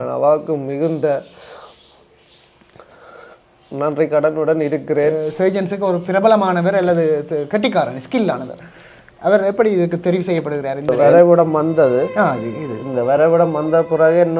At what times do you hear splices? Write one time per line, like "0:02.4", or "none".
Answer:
0:05.1
0:10.9